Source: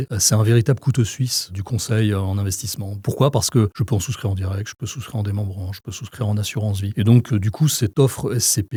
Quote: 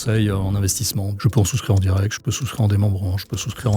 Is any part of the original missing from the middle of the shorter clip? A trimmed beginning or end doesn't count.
yes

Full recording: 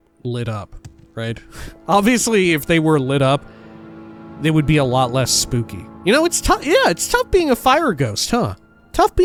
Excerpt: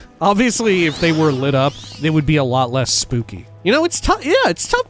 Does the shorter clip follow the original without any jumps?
no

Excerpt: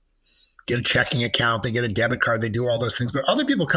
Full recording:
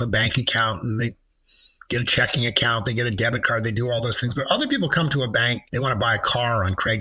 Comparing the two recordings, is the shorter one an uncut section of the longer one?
yes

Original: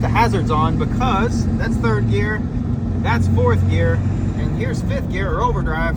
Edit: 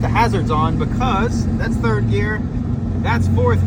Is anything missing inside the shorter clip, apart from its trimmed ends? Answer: no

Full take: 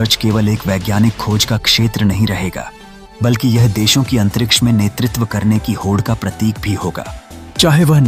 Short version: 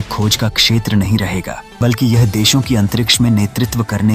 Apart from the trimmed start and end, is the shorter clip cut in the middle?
yes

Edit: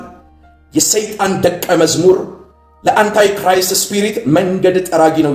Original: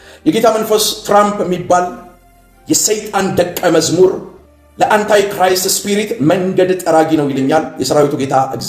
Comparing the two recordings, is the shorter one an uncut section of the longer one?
yes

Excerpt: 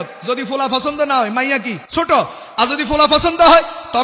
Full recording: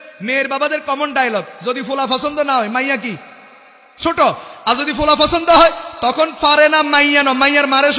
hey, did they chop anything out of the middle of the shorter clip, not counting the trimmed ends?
yes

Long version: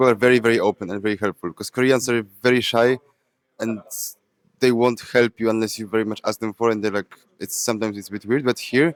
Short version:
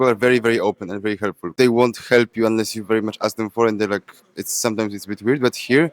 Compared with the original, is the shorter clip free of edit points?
no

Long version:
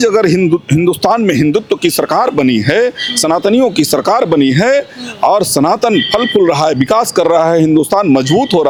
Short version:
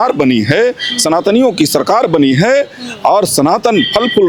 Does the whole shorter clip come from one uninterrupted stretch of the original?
yes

